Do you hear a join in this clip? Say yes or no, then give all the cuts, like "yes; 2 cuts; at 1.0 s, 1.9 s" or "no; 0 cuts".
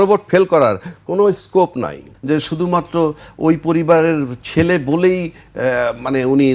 yes; 1 cut; at 2.1 s